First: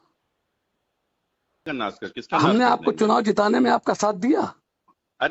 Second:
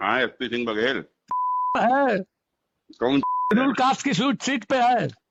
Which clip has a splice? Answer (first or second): first